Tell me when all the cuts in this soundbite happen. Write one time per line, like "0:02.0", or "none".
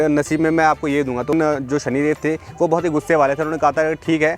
0:01.3